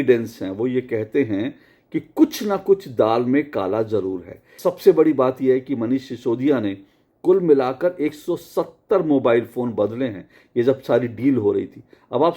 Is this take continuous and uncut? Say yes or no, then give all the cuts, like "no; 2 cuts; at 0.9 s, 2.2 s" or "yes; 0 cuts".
no; 1 cut; at 4.5 s